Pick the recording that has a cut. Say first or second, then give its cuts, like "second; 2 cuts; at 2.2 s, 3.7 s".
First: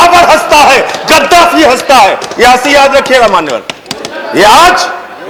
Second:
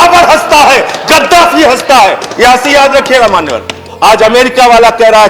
second; 1 cut; at 3.8 s